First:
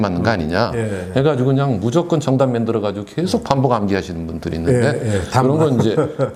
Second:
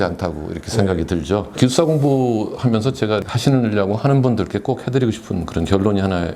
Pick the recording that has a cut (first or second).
second